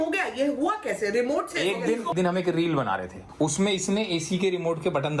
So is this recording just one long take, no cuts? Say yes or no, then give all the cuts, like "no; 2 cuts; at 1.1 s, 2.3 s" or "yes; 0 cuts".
no; 2 cuts; at 2.1 s, 3.2 s